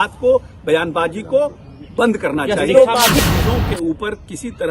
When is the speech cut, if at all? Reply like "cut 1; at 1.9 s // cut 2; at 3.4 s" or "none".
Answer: cut 1; at 3.2 s